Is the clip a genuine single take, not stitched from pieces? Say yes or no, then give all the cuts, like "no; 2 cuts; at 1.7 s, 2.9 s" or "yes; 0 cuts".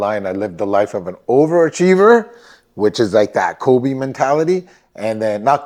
yes; 0 cuts